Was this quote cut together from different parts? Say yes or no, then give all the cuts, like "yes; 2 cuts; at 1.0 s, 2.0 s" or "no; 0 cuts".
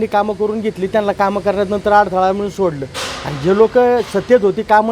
no; 0 cuts